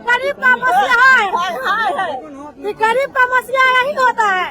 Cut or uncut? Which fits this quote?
uncut